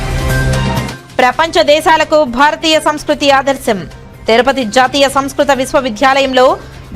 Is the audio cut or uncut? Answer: cut